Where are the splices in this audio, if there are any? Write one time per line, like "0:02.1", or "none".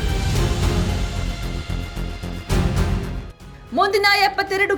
none

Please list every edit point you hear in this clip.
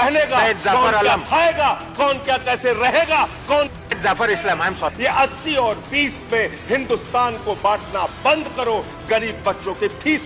0:04.9

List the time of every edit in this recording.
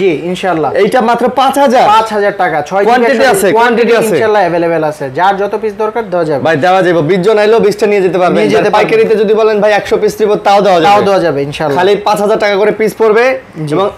none

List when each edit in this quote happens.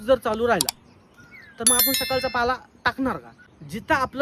0:03.3

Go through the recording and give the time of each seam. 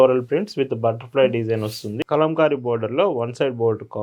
0:02.0

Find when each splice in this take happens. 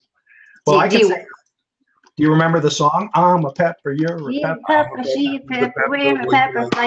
none

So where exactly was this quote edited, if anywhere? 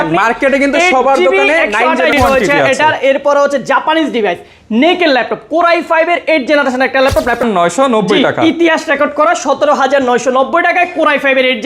0:02.1
0:07.4

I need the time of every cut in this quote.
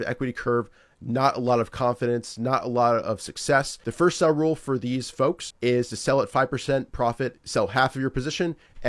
0:03.8
0:05.5
0:07.4

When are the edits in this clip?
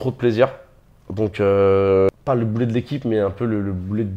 0:02.1

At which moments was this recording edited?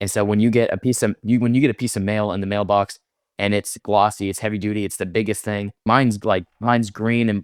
none

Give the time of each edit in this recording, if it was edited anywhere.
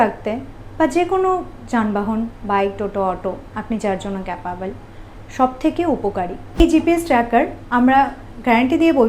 0:06.6

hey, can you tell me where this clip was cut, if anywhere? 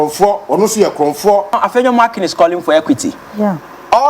0:01.6

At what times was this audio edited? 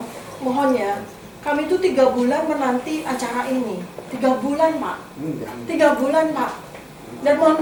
none

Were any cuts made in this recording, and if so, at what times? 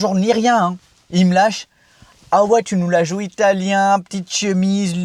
none

